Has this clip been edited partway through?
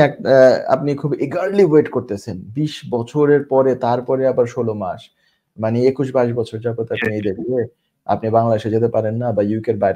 no; 0 cuts

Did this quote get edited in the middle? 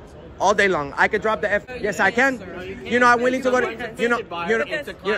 yes; 1 cut; at 1.7 s

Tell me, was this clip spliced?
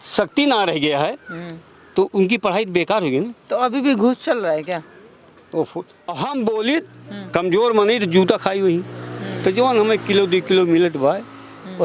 yes; 1 cut; at 6.1 s

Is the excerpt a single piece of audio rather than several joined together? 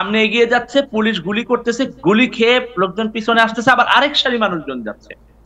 yes; 0 cuts

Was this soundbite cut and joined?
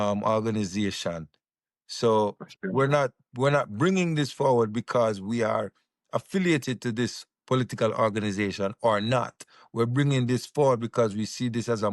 no; 0 cuts

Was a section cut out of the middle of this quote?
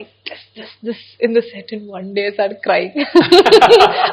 no; 0 cuts

